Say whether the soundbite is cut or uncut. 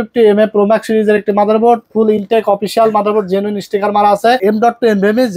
cut